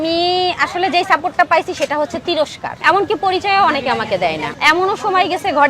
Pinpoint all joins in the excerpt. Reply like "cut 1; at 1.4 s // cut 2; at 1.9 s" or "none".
cut 1; at 2.8 s // cut 2; at 4.5 s